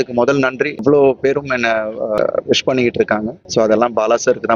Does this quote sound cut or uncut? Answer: cut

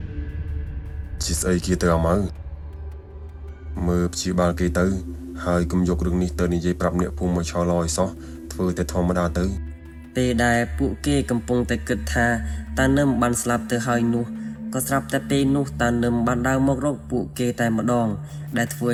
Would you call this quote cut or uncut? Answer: uncut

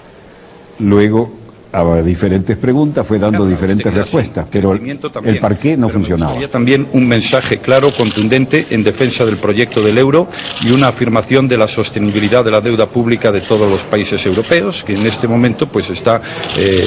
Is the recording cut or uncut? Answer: cut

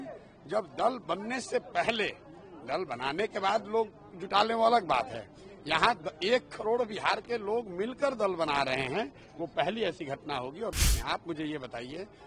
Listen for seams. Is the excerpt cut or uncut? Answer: cut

